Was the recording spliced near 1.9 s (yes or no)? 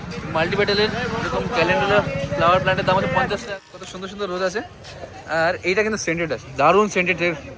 no